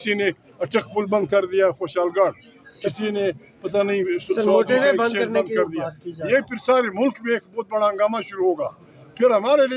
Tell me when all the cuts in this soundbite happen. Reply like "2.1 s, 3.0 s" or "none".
none

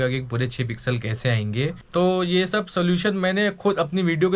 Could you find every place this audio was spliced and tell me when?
1.8 s

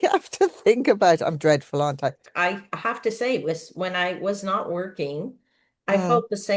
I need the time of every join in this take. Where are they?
2.2 s

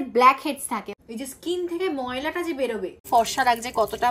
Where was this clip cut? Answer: 0.9 s, 3.0 s

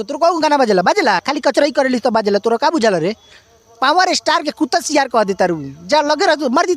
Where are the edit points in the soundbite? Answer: 1.2 s

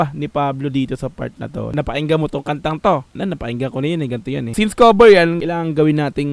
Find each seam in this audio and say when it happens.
1.7 s, 3.1 s, 4.5 s, 5.4 s

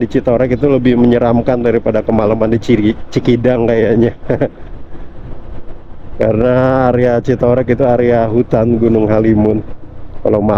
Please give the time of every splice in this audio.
none

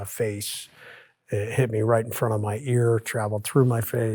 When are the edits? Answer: none

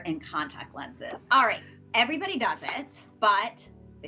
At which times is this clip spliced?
3.0 s

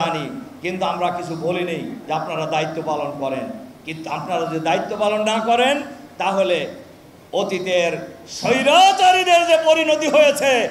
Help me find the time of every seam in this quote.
none

